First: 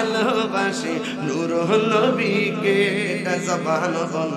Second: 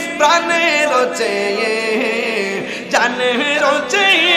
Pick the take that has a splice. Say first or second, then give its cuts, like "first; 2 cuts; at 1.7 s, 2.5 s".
first; 1 cut; at 3.1 s